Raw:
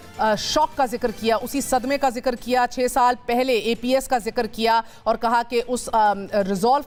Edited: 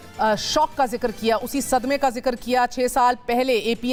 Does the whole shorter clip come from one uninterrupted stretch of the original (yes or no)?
yes